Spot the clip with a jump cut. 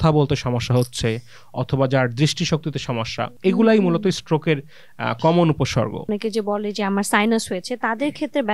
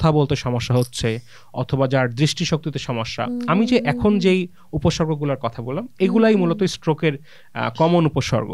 first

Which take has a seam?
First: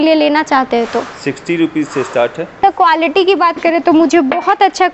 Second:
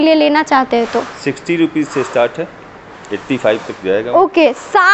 first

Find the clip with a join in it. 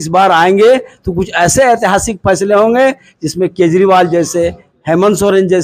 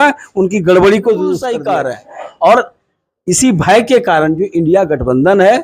second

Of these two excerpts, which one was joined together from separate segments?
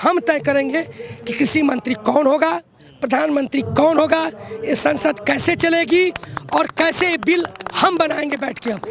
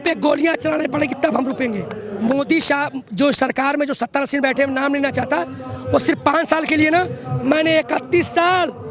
second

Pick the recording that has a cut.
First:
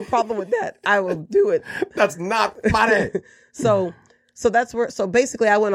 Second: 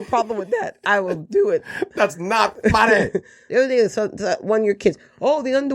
second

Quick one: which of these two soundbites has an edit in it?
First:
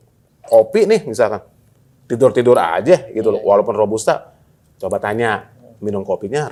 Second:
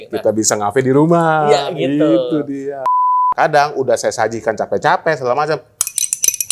second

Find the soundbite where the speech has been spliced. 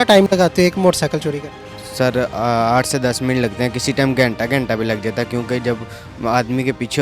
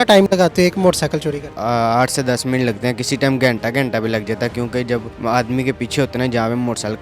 second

